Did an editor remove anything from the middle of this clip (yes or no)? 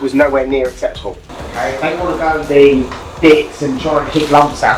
yes